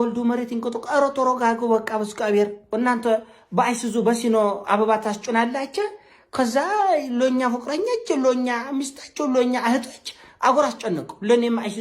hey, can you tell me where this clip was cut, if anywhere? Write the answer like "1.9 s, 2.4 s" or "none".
2.6 s